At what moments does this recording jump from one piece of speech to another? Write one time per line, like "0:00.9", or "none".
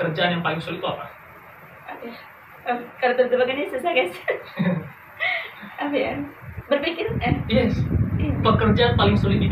none